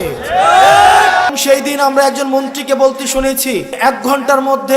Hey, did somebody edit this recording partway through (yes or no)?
yes